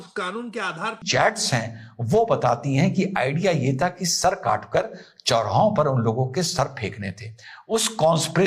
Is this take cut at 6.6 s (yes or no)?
no